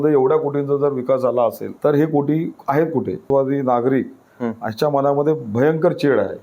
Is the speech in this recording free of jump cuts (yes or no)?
no